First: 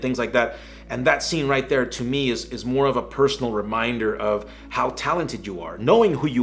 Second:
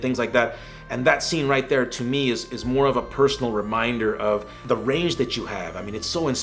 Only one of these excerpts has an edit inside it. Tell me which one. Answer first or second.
second